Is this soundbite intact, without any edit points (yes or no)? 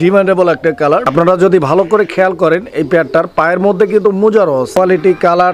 no